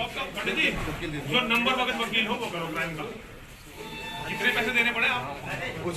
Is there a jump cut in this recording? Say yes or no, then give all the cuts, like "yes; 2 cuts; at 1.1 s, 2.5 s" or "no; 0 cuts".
no; 0 cuts